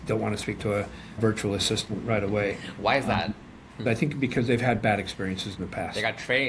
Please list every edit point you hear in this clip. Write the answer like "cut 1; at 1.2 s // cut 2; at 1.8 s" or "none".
cut 1; at 1.2 s // cut 2; at 3.8 s